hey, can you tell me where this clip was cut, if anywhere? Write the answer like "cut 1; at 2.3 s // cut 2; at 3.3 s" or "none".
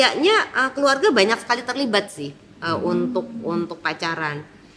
none